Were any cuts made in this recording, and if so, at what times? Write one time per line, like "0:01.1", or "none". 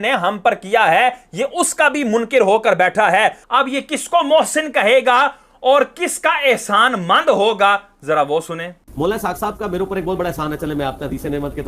0:03.4
0:10.2